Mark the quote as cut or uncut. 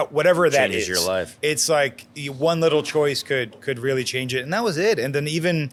uncut